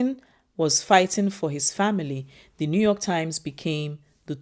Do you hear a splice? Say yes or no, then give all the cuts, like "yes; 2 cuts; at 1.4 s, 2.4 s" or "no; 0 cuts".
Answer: no; 0 cuts